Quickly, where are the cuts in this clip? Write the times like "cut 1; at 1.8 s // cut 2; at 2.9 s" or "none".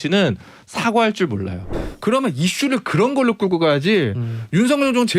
cut 1; at 1.7 s